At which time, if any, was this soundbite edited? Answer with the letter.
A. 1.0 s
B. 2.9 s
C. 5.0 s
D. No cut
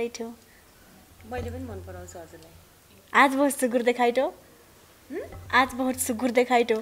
B